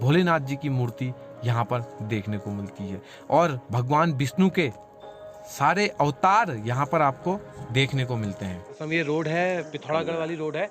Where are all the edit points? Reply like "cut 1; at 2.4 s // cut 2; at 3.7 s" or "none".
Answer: cut 1; at 8.8 s